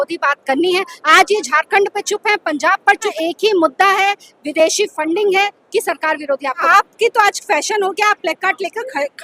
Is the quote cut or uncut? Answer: cut